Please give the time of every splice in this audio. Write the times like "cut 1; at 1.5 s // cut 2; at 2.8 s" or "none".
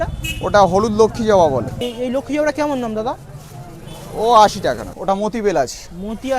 cut 1; at 1.8 s // cut 2; at 4.9 s